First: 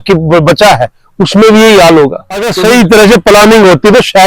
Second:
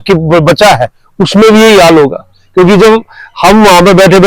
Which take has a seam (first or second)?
first